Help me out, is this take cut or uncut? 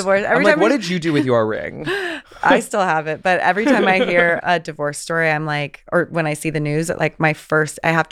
cut